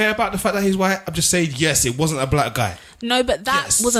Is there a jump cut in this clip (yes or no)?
no